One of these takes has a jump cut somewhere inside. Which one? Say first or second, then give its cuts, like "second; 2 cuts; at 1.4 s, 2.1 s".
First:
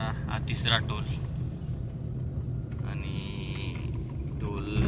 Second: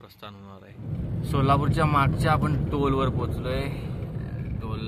second; 1 cut; at 1.0 s